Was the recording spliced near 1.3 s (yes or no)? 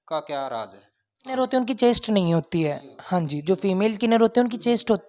yes